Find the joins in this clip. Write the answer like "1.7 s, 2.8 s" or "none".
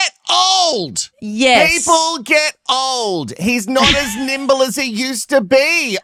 none